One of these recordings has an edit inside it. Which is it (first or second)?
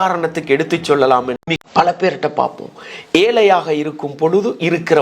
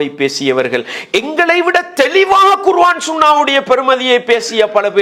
first